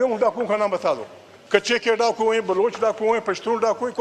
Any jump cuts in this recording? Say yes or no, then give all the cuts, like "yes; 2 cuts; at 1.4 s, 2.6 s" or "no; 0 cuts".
no; 0 cuts